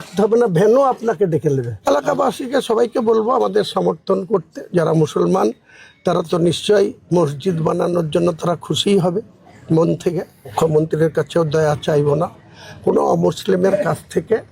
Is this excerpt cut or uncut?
cut